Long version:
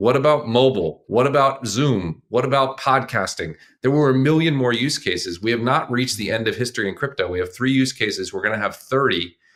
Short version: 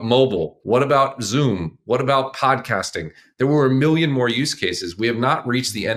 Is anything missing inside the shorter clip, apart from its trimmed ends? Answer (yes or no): no